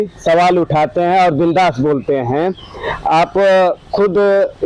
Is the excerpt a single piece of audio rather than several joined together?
yes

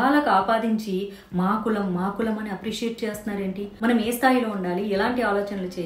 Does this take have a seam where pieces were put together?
yes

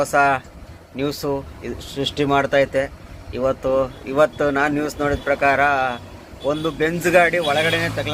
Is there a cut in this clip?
no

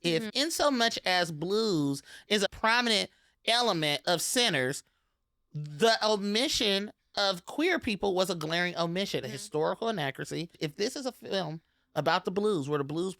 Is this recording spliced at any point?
yes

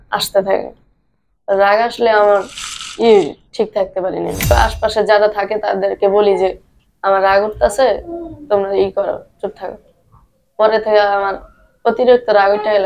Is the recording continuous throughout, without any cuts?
no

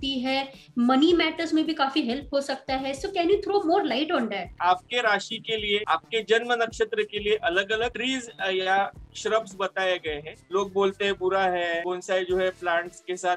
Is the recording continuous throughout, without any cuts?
no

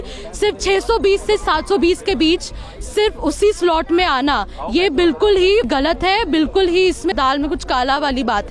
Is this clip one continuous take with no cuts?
no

